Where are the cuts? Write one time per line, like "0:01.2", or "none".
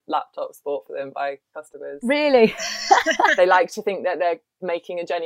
0:03.3